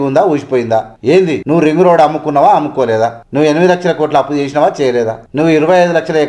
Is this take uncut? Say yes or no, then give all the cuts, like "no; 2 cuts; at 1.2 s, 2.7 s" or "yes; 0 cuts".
no; 3 cuts; at 1.3 s, 3.2 s, 5.2 s